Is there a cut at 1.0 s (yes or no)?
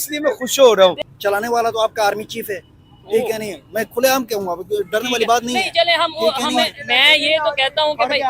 yes